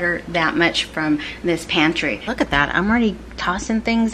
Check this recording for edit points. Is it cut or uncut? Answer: cut